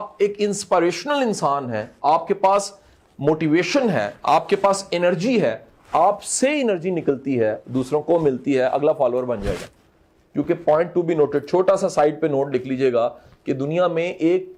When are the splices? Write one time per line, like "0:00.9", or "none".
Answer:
none